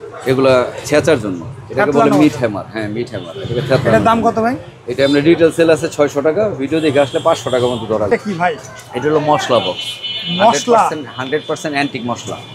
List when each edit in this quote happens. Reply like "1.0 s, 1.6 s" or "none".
8.1 s